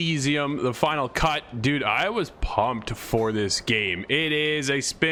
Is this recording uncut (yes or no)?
yes